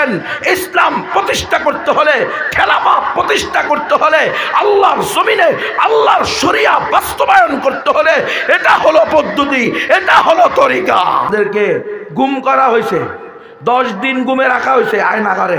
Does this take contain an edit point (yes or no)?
yes